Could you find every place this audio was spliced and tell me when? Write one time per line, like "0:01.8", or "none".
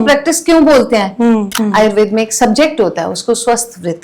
0:01.5